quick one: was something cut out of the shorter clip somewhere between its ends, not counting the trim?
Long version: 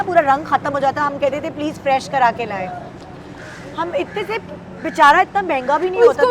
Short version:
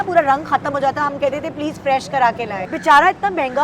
yes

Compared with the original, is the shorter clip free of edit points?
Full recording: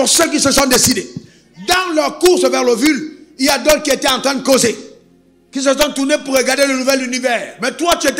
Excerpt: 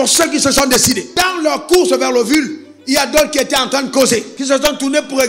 no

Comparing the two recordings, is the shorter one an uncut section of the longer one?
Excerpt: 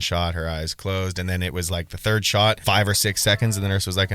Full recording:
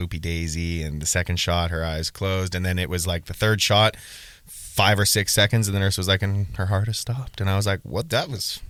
no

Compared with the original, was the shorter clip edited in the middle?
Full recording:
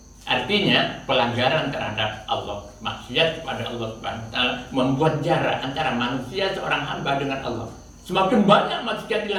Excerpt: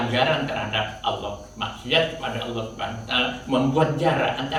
no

